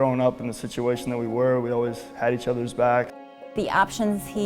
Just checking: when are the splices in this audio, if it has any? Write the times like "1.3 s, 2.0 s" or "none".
3.2 s